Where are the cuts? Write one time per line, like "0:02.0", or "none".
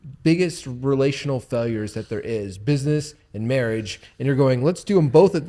none